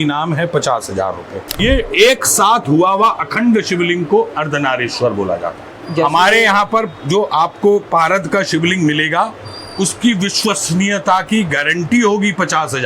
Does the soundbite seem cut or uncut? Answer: cut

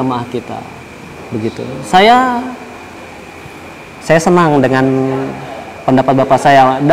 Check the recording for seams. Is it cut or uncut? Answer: uncut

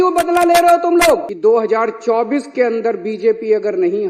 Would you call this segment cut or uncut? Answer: cut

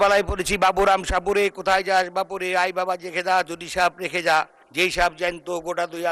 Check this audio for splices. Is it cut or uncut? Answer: uncut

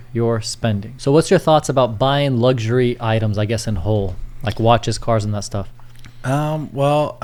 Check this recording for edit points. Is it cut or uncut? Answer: uncut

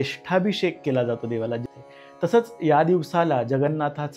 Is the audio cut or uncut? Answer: cut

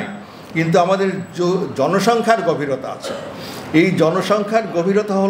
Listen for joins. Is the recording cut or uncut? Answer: uncut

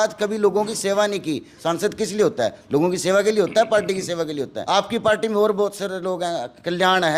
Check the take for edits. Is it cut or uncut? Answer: cut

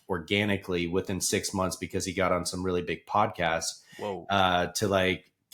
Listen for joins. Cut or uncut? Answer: uncut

